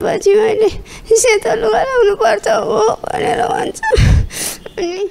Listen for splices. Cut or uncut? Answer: uncut